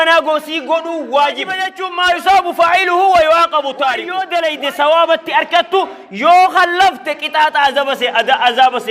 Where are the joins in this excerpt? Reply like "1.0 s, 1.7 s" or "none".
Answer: 1.8 s, 4.1 s